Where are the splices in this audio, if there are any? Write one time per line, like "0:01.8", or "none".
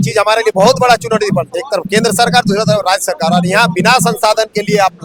none